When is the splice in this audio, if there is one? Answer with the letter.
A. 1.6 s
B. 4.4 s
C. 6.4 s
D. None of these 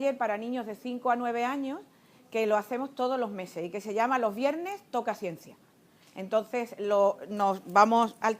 B